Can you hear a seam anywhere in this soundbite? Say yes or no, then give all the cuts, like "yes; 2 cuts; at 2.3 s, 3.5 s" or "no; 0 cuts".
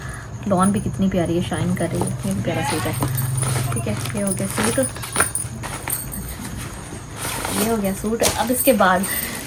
no; 0 cuts